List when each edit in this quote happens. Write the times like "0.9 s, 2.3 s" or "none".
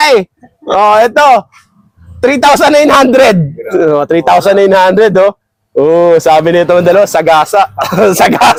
none